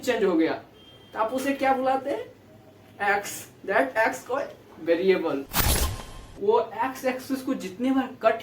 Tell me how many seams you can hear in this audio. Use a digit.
1